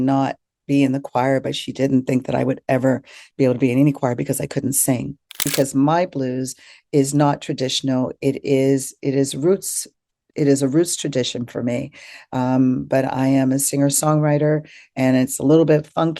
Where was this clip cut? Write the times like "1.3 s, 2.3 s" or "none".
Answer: 5.4 s